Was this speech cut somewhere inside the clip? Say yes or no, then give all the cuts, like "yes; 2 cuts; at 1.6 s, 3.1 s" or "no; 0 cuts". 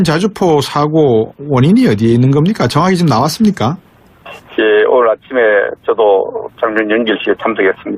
yes; 1 cut; at 1.8 s